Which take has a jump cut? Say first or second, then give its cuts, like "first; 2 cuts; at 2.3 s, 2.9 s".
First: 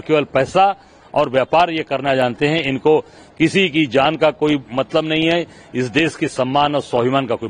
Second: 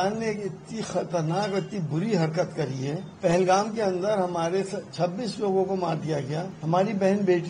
second; 2 cuts; at 3.1 s, 6.5 s